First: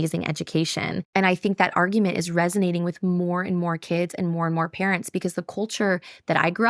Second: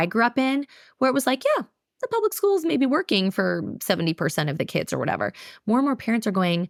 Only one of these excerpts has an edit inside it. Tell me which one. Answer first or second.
first